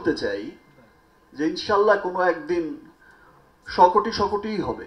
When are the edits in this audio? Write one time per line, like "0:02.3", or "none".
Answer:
none